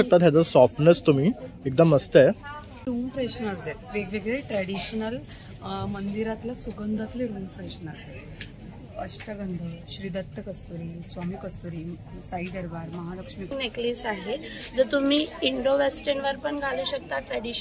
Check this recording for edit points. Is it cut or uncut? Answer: cut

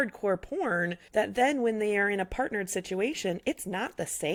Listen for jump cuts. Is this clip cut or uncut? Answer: uncut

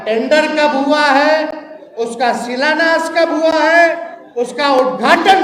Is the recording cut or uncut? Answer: uncut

